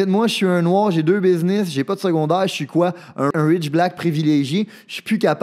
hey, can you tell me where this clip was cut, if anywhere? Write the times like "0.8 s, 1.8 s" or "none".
3.3 s